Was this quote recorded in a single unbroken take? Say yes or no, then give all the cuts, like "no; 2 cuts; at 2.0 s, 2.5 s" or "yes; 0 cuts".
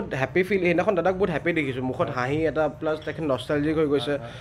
yes; 0 cuts